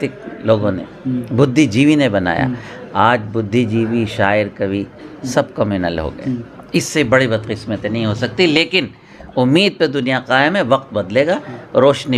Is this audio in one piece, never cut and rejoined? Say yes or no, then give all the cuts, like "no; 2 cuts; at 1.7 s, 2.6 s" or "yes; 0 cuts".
yes; 0 cuts